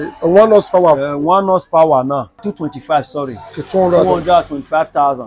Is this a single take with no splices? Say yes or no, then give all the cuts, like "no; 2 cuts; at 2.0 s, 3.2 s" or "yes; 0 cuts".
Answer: yes; 0 cuts